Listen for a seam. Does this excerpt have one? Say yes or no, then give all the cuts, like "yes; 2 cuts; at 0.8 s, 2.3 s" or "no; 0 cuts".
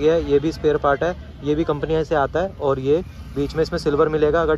no; 0 cuts